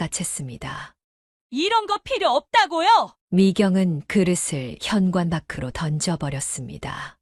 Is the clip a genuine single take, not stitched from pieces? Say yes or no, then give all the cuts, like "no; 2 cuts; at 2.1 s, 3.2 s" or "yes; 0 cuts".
yes; 0 cuts